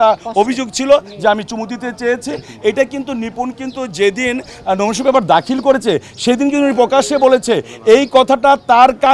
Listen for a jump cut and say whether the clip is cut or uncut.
uncut